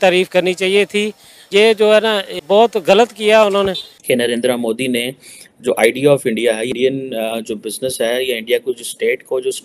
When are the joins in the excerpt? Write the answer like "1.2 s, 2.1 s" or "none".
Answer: 3.9 s